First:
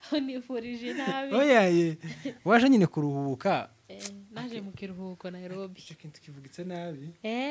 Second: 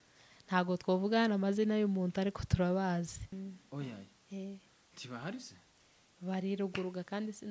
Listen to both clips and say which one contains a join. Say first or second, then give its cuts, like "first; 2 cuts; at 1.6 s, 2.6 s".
second; 1 cut; at 3.3 s